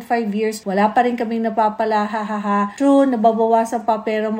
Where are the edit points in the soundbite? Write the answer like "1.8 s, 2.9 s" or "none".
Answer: none